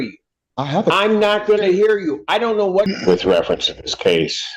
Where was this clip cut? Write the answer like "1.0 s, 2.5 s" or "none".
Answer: 2.9 s